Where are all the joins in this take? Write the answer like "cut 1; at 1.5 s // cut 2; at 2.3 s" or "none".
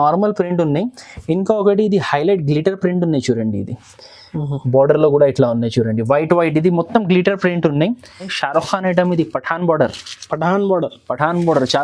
cut 1; at 8.4 s